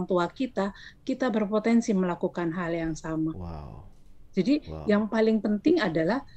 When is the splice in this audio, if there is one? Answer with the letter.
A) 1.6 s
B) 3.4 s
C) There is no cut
C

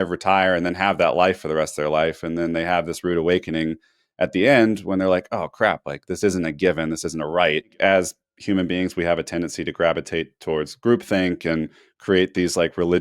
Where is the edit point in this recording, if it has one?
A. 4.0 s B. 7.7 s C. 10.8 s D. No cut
B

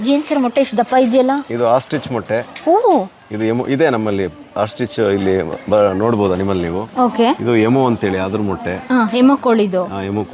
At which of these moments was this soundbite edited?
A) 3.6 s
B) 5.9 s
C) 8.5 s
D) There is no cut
D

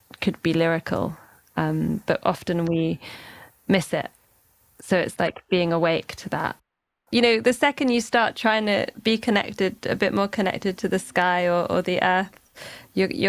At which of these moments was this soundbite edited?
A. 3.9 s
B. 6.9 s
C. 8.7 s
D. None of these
B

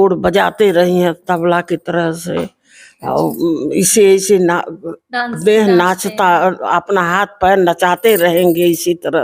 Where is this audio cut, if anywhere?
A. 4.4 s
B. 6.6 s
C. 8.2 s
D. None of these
D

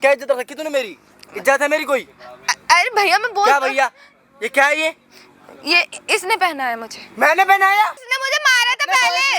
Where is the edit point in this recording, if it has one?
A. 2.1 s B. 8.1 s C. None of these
B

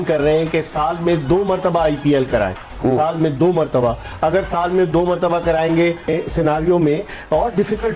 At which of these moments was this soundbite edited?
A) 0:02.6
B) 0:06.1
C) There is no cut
B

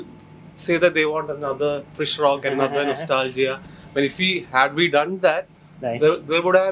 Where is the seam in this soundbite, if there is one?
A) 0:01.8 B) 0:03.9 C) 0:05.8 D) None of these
D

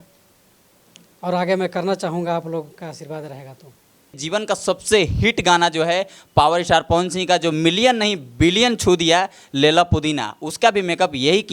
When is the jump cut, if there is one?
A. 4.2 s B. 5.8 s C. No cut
A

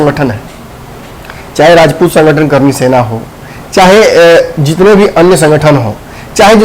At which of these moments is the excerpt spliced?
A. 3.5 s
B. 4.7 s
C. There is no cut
C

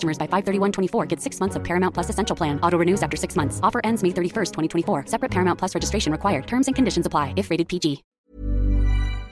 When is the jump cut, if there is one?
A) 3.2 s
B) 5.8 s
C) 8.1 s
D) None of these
C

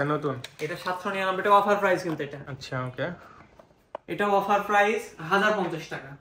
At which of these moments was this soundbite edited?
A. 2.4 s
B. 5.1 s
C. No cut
A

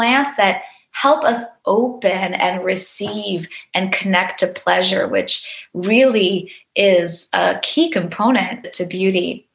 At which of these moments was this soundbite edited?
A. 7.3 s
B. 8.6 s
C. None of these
B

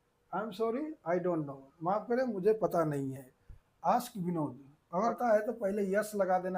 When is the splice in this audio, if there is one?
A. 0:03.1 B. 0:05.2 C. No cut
B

